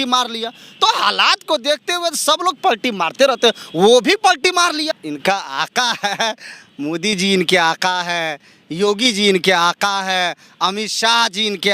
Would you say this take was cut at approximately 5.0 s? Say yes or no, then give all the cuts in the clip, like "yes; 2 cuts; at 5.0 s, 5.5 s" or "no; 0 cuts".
yes; 1 cut; at 5.0 s